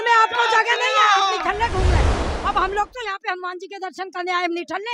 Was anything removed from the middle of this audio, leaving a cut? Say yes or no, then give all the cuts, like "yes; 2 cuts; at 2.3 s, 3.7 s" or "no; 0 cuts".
yes; 1 cut; at 2.2 s